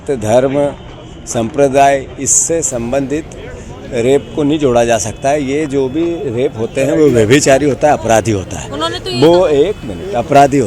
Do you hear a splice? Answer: no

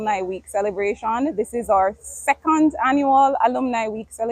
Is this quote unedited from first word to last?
yes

